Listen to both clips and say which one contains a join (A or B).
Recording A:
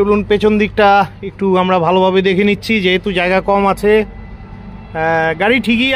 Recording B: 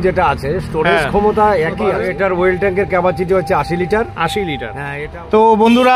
B